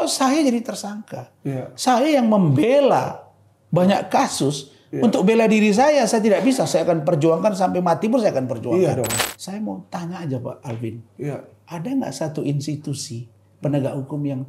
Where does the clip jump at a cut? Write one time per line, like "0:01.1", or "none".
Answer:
0:09.3

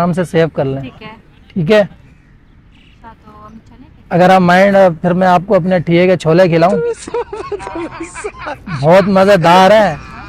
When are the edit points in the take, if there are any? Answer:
none

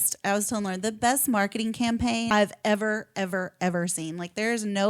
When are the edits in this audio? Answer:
0:02.3

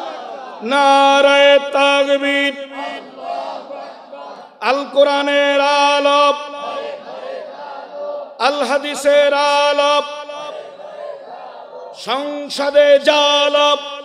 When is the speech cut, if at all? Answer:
none

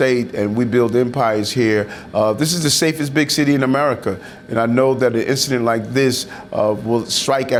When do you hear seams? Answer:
none

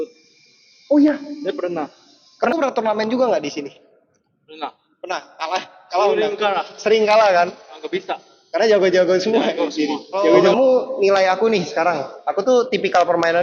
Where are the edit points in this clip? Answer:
0:02.5
0:10.2

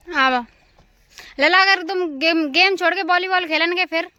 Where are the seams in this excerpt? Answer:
none

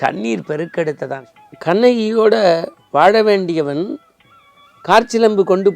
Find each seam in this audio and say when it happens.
0:01.2

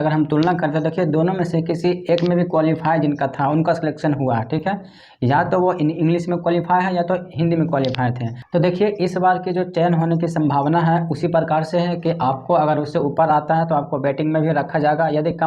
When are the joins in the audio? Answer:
0:08.3

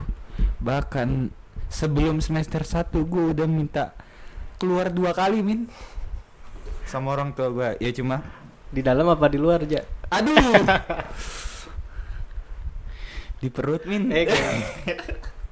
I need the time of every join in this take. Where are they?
none

